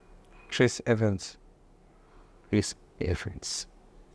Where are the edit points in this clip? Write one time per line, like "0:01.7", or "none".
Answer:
none